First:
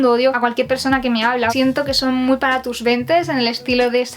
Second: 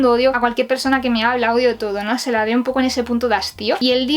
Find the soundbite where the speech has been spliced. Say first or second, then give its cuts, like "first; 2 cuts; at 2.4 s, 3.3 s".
first; 1 cut; at 1.5 s